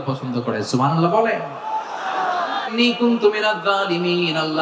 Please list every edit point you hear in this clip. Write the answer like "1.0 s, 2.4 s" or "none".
2.7 s